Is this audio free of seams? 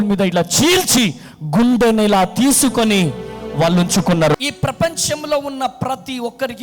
no; 1 cut; at 4.3 s

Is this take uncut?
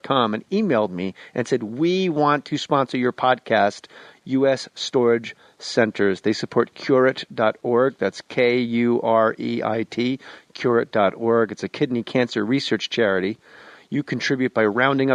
yes; 0 cuts

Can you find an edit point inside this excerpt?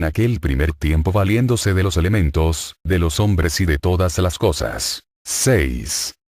yes; 1 cut; at 3.7 s

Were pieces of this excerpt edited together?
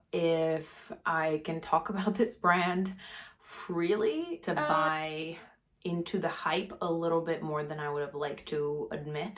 yes; 1 cut; at 4.5 s

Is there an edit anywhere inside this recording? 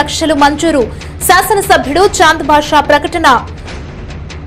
yes; 1 cut; at 3.5 s

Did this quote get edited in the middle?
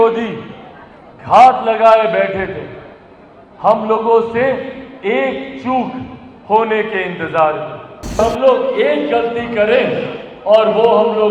yes; 1 cut; at 8.2 s

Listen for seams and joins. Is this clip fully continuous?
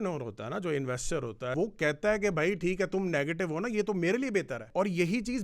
no; 2 cuts; at 1.5 s, 4.7 s

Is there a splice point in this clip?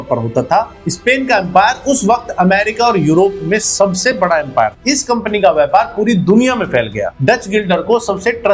yes; 2 cuts; at 4.8 s, 7.1 s

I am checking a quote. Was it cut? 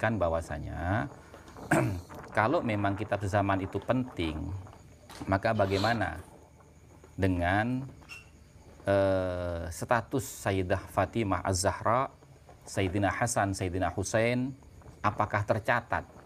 no; 0 cuts

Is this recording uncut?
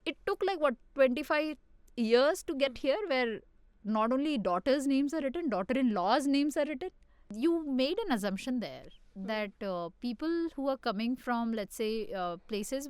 no; 1 cut; at 7.2 s

